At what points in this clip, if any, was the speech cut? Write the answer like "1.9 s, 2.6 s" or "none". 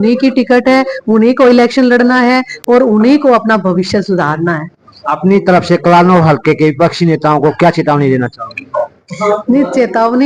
none